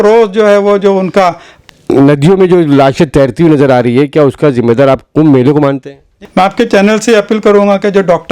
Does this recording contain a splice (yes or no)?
yes